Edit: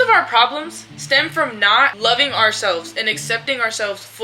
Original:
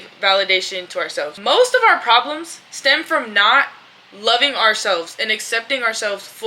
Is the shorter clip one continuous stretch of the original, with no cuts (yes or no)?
no